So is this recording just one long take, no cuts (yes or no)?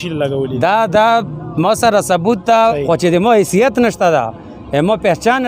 no